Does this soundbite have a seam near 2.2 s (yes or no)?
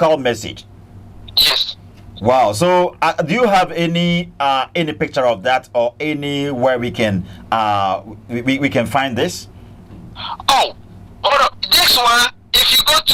no